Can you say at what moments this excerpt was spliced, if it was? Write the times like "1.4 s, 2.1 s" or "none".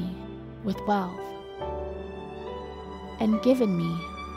none